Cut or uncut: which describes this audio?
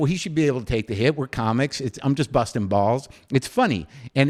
uncut